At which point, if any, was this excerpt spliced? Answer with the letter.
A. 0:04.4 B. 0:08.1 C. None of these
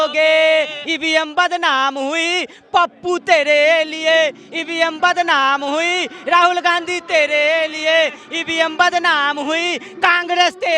C